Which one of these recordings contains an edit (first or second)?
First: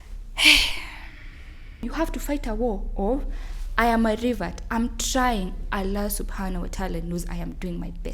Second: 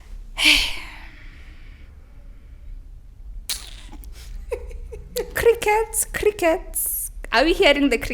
first